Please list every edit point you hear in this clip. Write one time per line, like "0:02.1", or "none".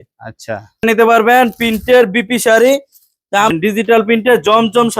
0:00.8
0:03.5